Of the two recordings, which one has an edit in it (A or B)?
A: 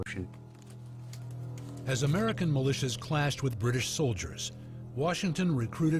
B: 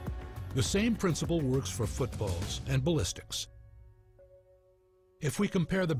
A